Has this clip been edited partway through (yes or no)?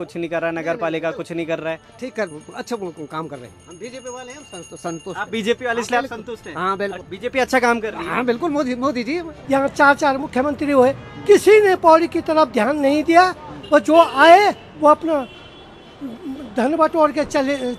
yes